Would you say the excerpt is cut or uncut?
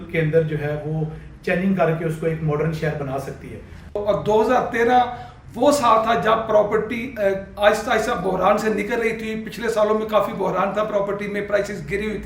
cut